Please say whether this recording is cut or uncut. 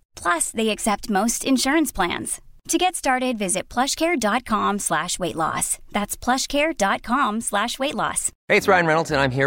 uncut